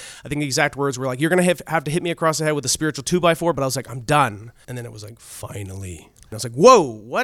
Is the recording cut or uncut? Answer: cut